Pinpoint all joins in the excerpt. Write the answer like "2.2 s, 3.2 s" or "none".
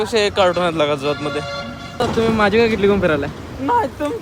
none